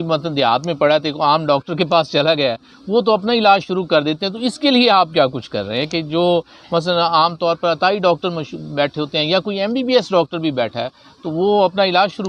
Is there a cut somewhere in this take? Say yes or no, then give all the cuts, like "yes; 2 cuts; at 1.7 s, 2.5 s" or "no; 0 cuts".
no; 0 cuts